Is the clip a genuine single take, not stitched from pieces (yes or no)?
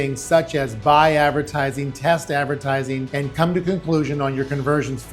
no